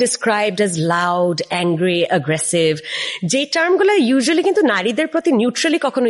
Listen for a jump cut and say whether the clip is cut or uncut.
uncut